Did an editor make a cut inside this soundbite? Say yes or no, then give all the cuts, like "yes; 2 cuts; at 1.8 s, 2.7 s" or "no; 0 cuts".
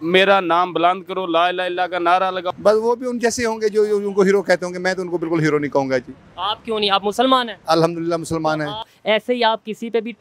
yes; 2 cuts; at 2.5 s, 8.9 s